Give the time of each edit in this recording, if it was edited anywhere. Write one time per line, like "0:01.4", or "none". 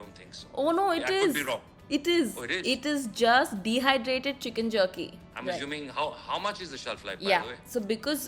0:05.2